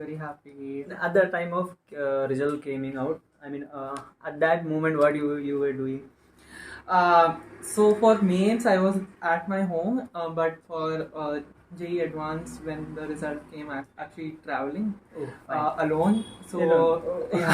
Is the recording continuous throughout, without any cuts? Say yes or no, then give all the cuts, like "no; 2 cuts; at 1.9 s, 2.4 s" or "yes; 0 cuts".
no; 2 cuts; at 1.0 s, 14.0 s